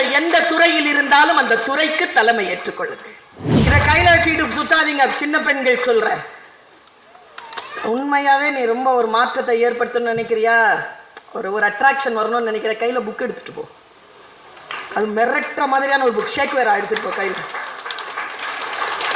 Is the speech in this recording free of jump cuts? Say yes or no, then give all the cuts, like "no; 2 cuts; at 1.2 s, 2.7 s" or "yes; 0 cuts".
no; 1 cut; at 3.7 s